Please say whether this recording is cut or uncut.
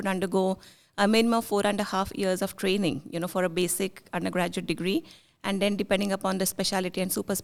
uncut